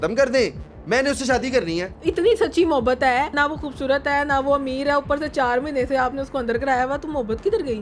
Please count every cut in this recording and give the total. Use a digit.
2